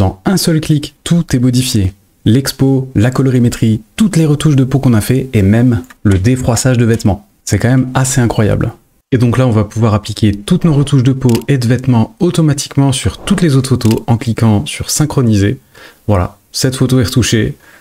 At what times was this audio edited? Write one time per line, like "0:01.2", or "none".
0:01.0